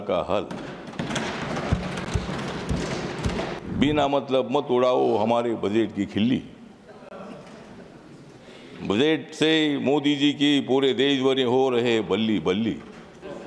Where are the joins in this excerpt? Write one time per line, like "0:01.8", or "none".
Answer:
0:03.6